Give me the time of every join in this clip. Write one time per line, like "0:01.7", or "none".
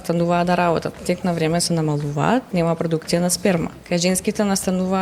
0:01.0
0:02.5
0:03.8

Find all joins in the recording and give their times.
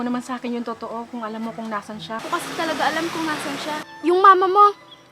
0:02.2
0:03.9

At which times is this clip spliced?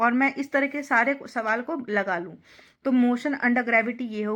none

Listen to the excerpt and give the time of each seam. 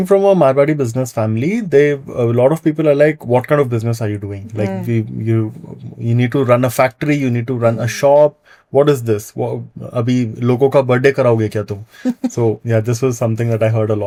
none

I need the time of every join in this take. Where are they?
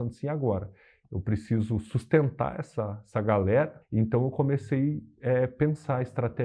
0:03.8

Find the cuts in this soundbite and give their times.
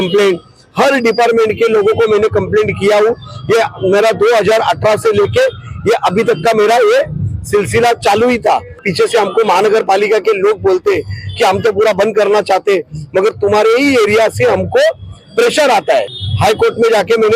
0:08.8
0:16.2

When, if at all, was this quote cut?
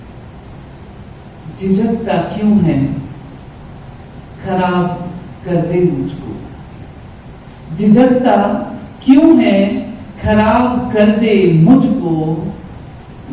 none

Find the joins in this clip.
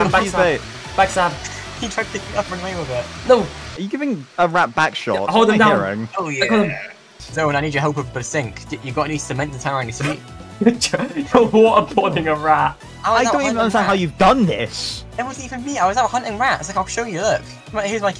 0:07.2
0:10.4
0:12.9

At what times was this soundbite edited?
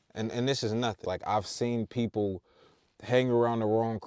0:01.0

